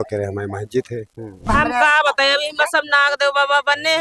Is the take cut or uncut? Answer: cut